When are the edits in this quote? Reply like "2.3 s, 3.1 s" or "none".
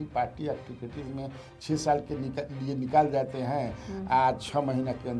none